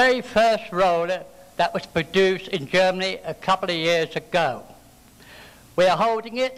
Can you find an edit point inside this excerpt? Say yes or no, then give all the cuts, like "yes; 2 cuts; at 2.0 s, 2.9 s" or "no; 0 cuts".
no; 0 cuts